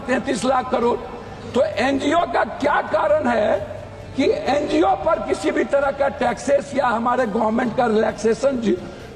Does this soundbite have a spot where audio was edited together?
no; 0 cuts

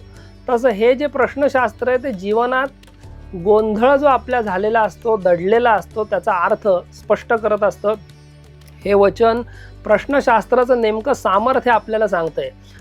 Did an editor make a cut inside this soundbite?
no; 0 cuts

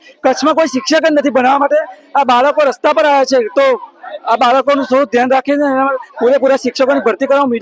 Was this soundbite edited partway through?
no; 0 cuts

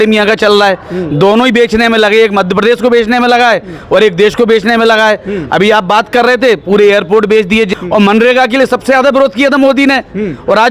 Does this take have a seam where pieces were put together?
yes; 1 cut; at 7.7 s

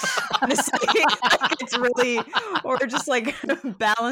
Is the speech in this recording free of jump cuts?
yes; 0 cuts

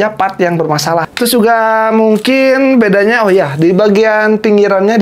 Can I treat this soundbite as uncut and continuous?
no; 1 cut; at 1.1 s

